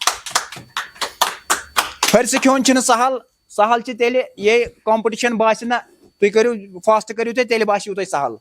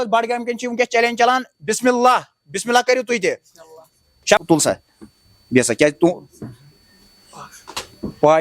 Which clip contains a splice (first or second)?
second